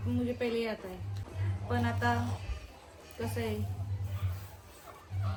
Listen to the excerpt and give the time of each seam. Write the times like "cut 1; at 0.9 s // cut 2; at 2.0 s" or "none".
none